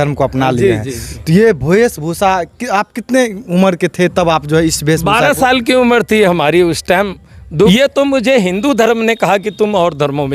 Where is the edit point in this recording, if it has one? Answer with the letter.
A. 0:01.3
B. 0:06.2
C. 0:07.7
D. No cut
C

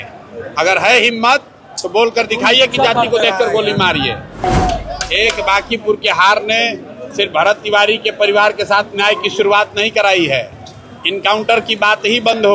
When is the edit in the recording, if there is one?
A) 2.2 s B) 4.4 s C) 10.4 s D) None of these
B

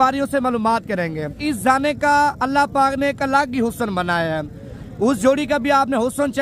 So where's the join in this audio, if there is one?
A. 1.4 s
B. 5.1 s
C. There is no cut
A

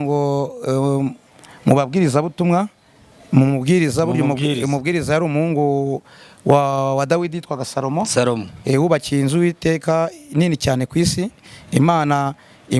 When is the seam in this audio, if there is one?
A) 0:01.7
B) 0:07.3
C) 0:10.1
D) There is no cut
D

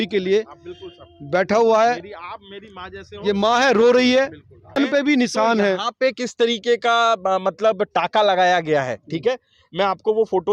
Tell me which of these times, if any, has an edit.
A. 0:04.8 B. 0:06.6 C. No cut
A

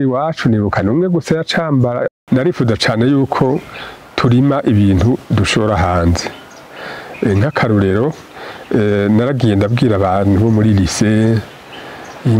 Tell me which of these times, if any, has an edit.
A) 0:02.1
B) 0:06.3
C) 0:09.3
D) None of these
A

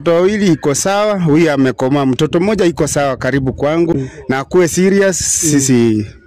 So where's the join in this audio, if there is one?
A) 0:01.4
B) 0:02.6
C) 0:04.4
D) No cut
C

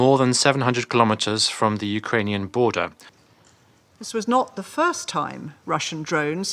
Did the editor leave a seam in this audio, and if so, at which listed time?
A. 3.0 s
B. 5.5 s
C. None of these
A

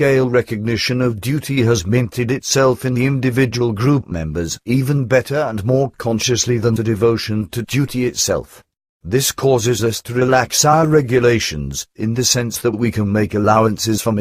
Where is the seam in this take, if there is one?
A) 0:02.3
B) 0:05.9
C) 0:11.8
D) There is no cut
C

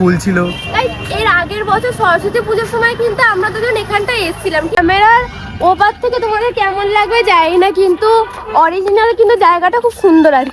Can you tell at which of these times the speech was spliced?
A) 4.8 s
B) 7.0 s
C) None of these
A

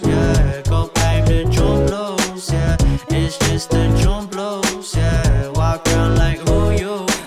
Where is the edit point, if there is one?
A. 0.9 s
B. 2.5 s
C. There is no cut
A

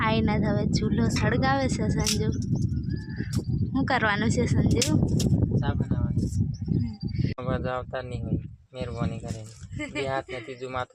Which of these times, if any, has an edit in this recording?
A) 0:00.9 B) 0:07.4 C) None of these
B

